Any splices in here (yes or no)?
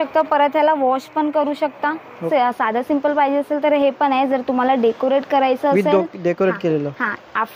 yes